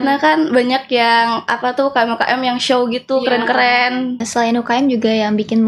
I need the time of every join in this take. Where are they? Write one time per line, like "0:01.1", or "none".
0:04.3